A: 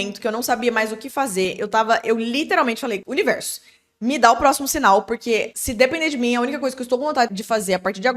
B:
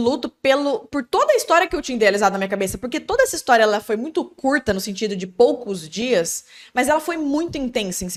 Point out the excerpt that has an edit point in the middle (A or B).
A